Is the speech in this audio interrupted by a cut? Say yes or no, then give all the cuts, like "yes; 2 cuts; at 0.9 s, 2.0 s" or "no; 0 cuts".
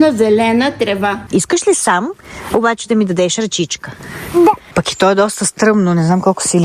yes; 2 cuts; at 1.2 s, 4.6 s